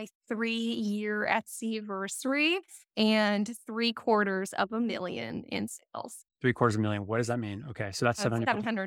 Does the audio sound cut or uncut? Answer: uncut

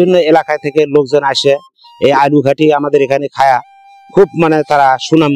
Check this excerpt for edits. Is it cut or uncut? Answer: uncut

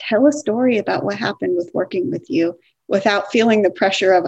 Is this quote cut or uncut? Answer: uncut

